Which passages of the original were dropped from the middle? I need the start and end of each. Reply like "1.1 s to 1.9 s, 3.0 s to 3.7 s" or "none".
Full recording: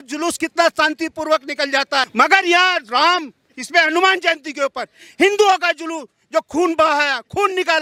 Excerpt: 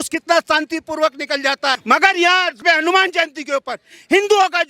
2.8 s to 3.6 s